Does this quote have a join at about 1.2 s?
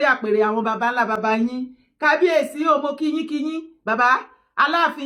no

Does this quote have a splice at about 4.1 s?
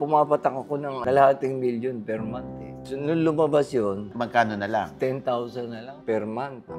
yes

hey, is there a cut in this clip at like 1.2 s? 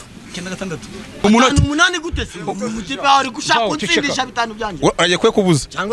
yes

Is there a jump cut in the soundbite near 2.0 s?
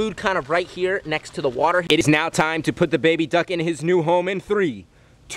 yes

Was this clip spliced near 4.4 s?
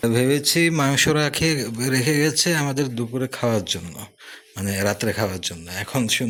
no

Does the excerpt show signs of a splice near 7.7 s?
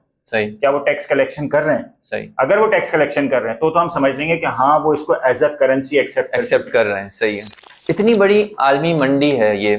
yes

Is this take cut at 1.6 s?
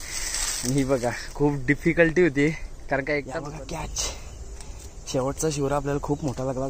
no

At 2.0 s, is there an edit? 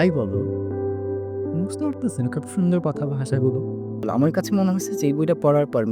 no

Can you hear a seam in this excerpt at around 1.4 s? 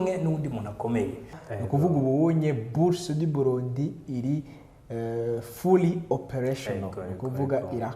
yes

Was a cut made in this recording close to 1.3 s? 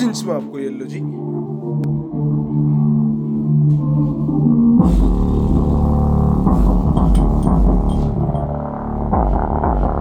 no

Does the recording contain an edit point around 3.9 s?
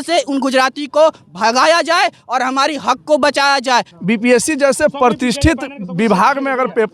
yes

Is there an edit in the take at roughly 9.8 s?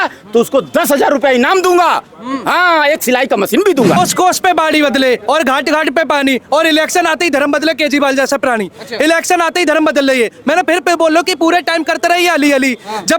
no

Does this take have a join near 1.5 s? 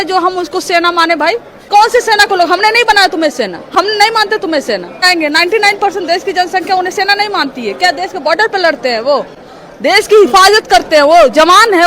yes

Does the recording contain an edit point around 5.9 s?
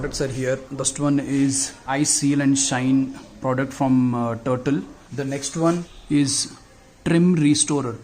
yes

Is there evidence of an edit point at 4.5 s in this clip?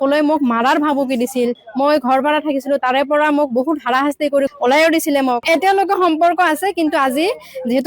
yes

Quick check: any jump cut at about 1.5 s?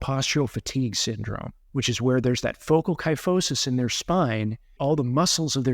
yes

